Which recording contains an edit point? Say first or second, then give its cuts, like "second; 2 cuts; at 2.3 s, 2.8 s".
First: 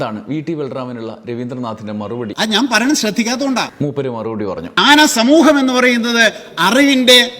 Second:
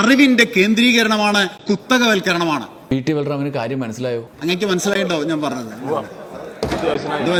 first; 2 cuts; at 2.3 s, 4.1 s